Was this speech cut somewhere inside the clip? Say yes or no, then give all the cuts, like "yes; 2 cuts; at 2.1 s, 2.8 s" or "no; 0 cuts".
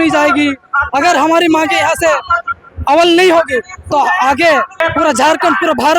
yes; 1 cut; at 4.7 s